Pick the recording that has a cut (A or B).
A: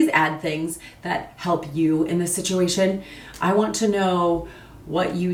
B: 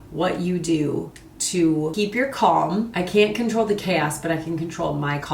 B